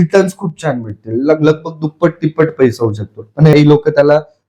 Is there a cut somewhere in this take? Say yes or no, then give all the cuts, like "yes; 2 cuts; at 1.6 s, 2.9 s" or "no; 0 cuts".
yes; 1 cut; at 3.5 s